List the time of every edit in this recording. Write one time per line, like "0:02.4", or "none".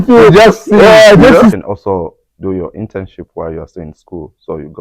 0:01.6

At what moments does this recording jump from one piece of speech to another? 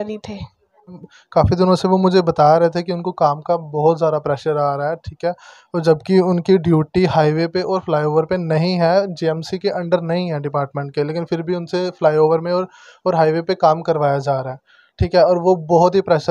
0:01.1

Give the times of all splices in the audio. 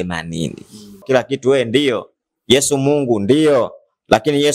0:01.0

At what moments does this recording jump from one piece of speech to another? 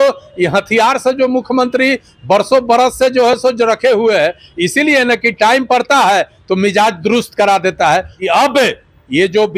0:08.1

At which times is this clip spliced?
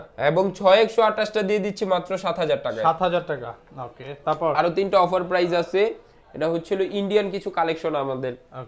none

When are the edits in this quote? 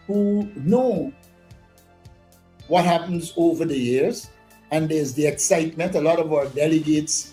none

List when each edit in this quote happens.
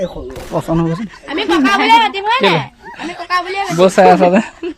none

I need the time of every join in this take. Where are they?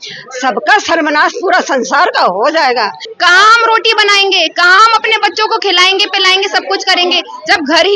0:03.0

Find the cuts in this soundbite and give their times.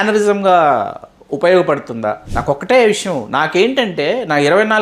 0:02.3

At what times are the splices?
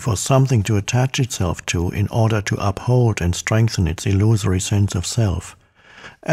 0:01.6

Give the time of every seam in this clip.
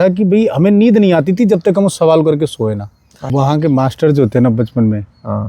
0:03.3

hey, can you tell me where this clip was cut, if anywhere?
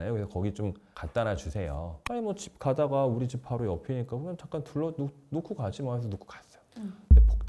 0:02.0

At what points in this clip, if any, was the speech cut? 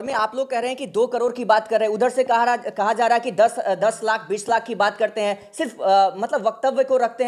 none

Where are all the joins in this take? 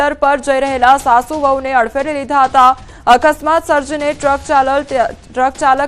0:03.6

